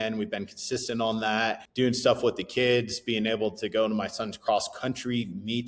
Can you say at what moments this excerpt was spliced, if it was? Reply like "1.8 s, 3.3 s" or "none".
1.6 s